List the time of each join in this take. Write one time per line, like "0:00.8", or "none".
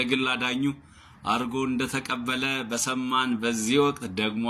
none